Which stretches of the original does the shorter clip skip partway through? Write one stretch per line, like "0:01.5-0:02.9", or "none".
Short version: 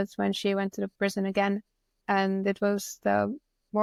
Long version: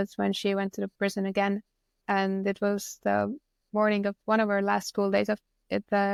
none